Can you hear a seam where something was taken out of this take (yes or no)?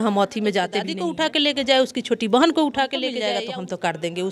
yes